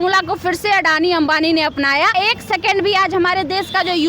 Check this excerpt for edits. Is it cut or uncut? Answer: cut